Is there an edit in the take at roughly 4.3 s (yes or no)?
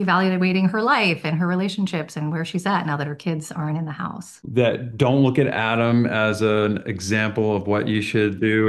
yes